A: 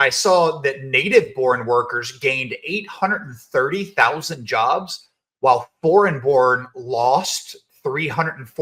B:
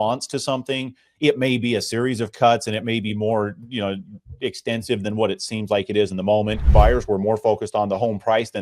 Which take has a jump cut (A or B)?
B